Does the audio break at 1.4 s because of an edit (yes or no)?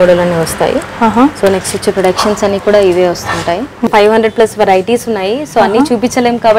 no